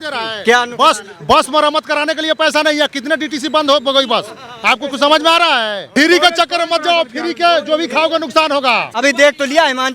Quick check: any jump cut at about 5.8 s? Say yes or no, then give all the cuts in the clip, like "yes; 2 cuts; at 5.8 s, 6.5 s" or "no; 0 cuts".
yes; 2 cuts; at 5.8 s, 9.0 s